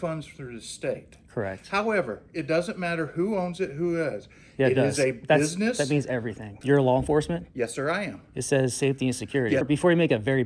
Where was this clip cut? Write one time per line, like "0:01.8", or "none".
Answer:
0:06.5
0:09.6

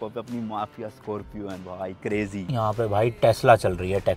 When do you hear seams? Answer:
0:02.5

